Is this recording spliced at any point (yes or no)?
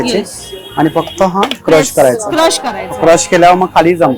no